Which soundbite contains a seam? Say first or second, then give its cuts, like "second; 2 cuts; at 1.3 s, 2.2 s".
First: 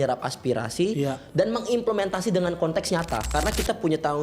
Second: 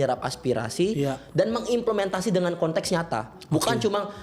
first; 1 cut; at 3.3 s